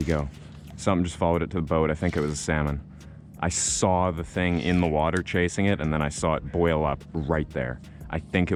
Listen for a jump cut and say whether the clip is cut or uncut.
uncut